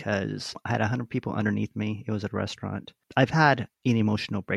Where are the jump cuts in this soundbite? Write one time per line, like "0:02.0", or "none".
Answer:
none